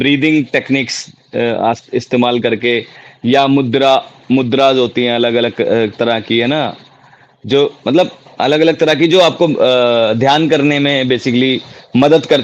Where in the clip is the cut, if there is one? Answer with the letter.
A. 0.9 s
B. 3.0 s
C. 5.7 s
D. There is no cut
C